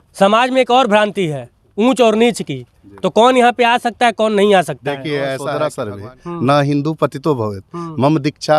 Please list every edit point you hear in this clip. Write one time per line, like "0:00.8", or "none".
0:05.6